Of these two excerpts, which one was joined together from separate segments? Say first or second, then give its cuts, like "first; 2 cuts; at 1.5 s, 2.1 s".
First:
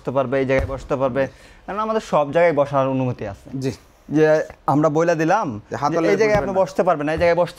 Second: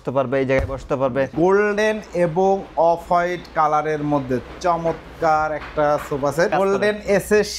second; 2 cuts; at 1.3 s, 6.5 s